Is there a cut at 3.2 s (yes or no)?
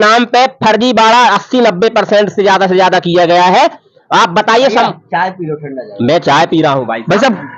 no